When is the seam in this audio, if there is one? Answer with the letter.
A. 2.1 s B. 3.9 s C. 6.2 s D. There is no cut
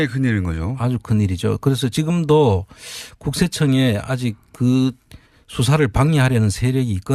C